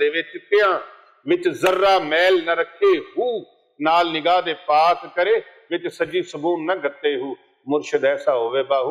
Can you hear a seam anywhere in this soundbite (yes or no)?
no